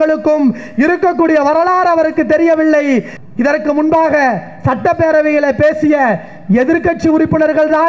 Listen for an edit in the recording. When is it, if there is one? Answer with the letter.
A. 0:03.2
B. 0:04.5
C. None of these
A